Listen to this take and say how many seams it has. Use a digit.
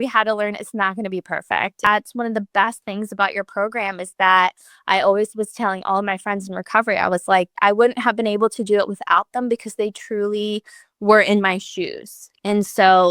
2